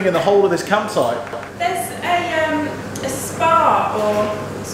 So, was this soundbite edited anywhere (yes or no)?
no